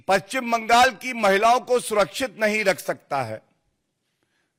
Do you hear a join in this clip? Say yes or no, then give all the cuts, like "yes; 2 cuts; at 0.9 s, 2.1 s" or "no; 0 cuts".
no; 0 cuts